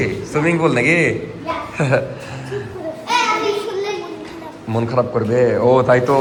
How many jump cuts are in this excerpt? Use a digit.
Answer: 0